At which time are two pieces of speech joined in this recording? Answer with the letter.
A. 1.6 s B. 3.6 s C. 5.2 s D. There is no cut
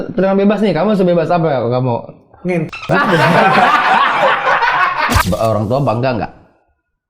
C